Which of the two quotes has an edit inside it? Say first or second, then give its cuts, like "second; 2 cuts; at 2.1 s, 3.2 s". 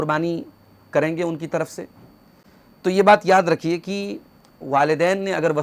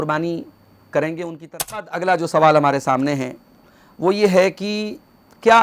second; 1 cut; at 1.9 s